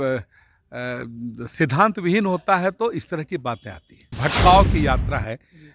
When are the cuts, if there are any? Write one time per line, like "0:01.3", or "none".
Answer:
0:04.1